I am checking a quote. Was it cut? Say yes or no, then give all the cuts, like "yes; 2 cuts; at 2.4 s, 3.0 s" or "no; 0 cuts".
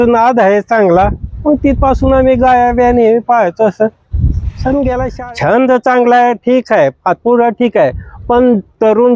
yes; 1 cut; at 5.1 s